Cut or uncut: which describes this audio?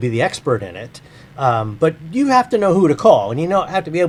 uncut